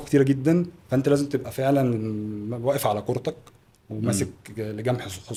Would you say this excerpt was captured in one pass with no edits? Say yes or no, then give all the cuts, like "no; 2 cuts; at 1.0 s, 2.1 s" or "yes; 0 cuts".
yes; 0 cuts